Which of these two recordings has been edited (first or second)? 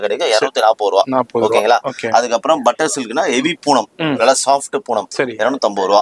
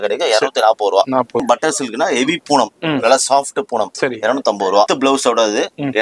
second